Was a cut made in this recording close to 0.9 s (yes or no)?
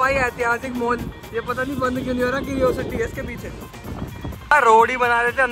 no